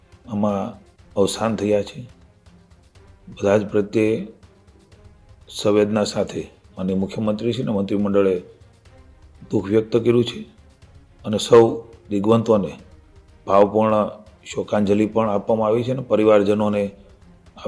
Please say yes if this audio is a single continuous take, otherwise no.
yes